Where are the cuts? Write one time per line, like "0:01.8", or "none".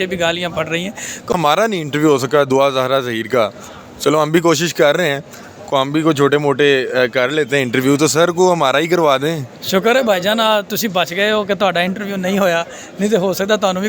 0:01.3